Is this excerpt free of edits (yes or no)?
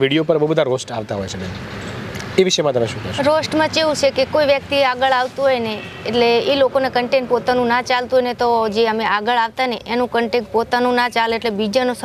yes